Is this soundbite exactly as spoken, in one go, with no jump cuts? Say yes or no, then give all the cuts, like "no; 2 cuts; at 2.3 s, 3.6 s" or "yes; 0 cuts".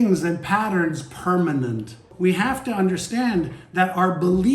no; 1 cut; at 2.1 s